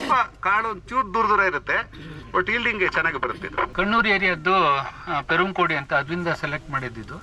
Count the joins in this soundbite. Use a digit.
1